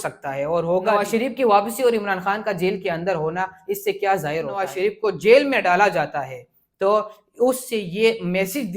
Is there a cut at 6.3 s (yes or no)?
no